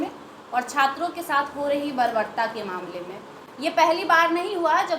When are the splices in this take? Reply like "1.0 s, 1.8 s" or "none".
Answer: none